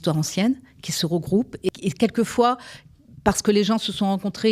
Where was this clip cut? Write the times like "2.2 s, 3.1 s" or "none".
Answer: 1.7 s